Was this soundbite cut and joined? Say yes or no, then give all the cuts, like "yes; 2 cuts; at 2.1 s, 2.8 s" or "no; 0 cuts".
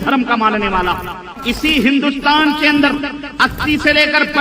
yes; 1 cut; at 1.3 s